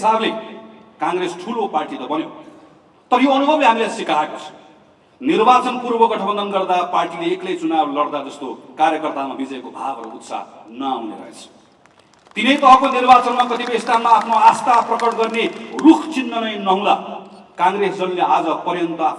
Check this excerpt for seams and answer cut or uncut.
uncut